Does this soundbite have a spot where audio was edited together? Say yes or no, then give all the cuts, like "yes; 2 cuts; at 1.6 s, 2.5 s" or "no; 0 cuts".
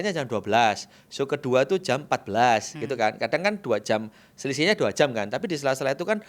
no; 0 cuts